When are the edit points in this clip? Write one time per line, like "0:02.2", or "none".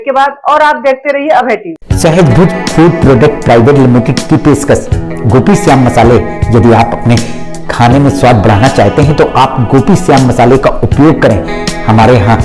0:01.7